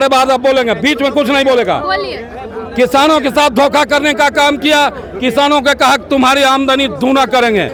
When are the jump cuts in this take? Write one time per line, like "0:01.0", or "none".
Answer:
none